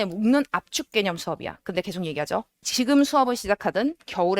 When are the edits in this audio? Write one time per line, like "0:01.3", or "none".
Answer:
0:02.6

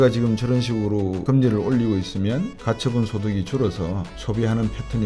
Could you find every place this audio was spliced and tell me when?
0:01.2
0:02.6
0:04.1

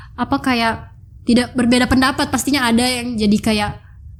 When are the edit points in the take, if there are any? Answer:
none

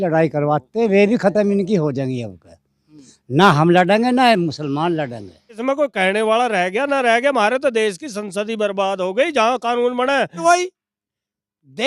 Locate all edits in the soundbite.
0:05.6
0:10.4

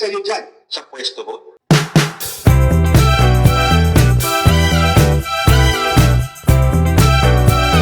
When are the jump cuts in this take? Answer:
0:01.5

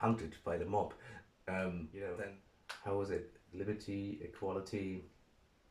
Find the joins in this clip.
0:02.1

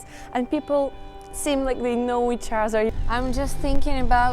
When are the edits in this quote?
0:02.9

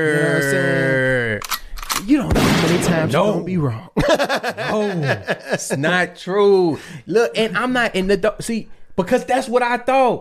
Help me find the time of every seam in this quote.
none

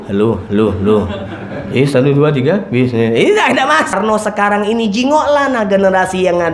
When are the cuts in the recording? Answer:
0:03.9

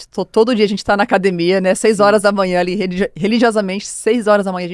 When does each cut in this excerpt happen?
none

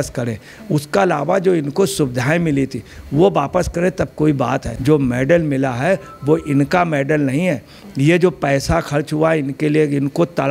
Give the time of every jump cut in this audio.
0:04.7

